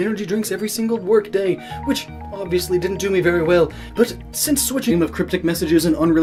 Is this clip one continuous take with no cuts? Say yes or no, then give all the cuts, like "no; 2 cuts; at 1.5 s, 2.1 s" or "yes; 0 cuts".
yes; 0 cuts